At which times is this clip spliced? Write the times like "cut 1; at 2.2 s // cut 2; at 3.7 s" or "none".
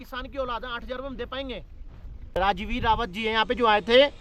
cut 1; at 2.3 s